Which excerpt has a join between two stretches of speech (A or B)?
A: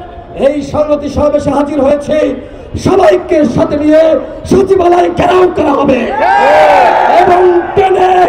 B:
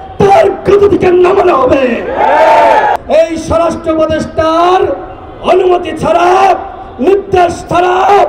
B